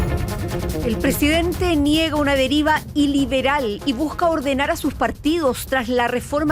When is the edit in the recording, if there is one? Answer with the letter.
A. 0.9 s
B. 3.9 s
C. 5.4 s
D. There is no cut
A